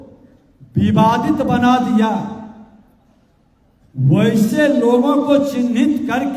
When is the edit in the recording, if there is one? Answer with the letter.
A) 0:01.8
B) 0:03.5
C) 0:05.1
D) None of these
D